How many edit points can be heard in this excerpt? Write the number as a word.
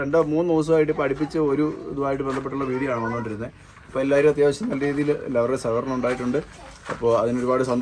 zero